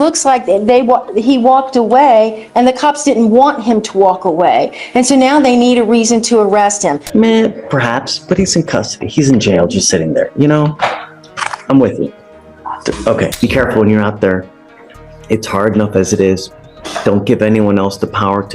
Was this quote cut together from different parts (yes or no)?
yes